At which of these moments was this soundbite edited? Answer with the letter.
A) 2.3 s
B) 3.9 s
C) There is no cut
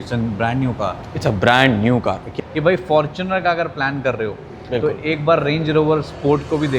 A